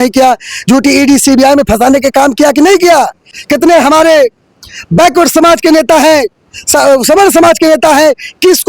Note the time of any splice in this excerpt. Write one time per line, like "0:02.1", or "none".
none